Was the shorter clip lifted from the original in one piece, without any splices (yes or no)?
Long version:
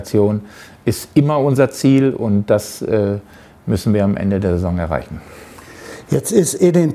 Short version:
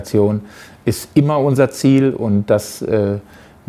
yes